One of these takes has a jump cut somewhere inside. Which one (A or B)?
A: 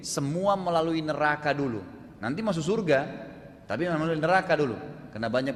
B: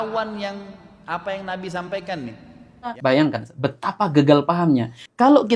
B